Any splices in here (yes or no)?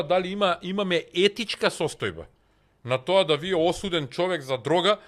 no